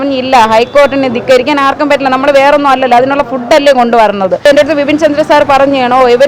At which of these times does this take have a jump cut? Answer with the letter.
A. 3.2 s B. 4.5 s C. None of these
B